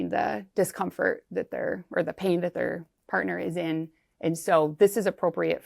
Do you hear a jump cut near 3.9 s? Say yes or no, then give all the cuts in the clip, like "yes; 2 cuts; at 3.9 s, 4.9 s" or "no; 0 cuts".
no; 0 cuts